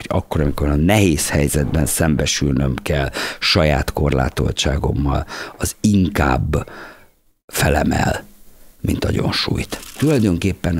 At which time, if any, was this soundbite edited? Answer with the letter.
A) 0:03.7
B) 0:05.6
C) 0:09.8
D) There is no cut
C